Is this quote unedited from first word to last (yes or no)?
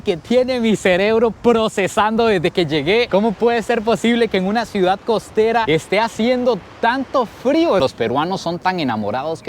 no